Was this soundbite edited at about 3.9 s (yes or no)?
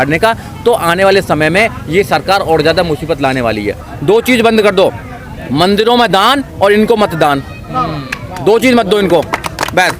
yes